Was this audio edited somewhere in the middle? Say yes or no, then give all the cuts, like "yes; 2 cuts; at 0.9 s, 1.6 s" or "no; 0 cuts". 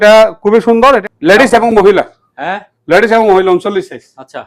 yes; 1 cut; at 1.0 s